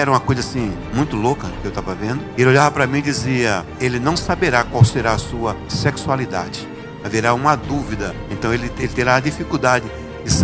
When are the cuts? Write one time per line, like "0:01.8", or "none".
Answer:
none